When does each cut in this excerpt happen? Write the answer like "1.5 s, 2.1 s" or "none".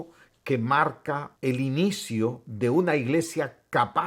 1.3 s, 2.5 s